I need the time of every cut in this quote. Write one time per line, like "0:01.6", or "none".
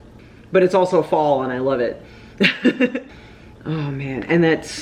0:03.1